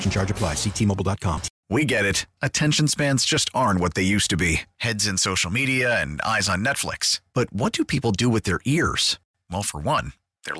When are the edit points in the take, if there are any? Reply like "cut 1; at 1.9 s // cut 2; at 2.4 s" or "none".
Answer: cut 1; at 1.5 s